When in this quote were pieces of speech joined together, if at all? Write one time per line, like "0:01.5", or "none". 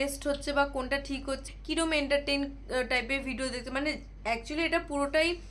0:01.4